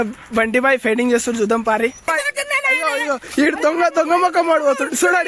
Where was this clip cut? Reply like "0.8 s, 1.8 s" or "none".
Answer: 2.0 s